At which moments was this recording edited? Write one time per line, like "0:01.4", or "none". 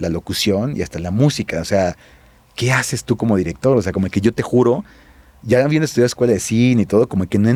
none